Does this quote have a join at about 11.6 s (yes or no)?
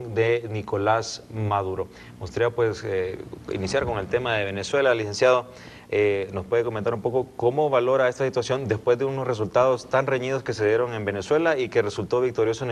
yes